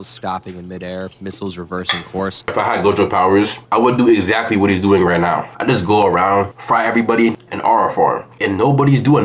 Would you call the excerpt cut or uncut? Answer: cut